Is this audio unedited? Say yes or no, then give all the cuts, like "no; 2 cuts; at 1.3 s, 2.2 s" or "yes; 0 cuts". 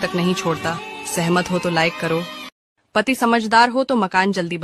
no; 1 cut; at 2.7 s